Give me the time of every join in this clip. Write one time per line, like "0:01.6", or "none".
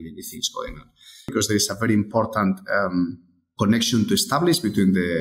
0:01.3

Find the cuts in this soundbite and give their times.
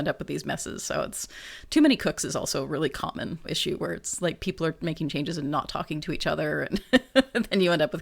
0:03.4

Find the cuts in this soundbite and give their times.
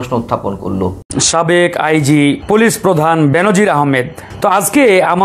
0:01.0
0:02.4
0:04.2

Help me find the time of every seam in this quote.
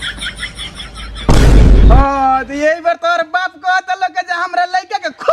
0:01.3
0:01.9

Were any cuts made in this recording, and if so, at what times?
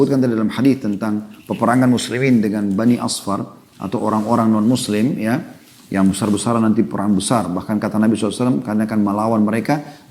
none

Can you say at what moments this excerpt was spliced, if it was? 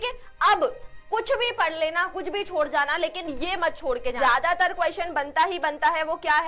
0:04.2

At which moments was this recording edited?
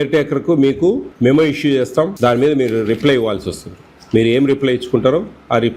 0:01.1
0:02.1

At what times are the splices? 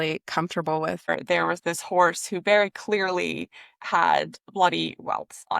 0:01.1

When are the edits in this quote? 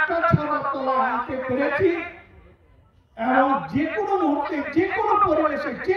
none

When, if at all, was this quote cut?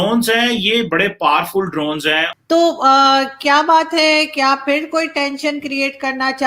0:02.3

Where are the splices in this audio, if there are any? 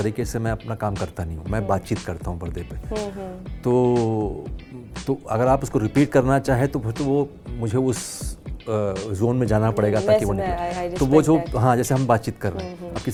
none

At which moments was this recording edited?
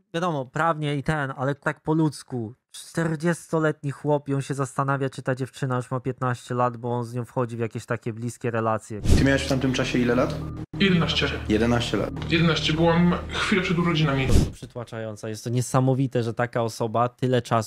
0:01.6
0:09.0
0:14.3

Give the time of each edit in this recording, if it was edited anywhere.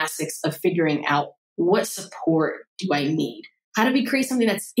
0:03.6

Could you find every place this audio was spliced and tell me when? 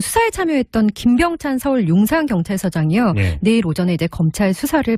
none

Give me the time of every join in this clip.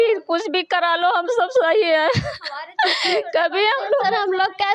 none

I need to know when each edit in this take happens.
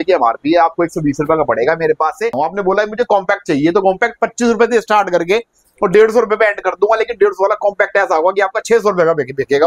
0:02.3

